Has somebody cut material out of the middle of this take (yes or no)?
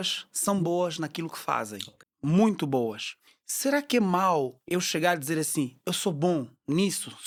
no